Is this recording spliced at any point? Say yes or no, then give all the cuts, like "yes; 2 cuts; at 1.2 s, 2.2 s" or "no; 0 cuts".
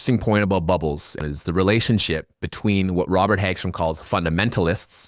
yes; 1 cut; at 1.2 s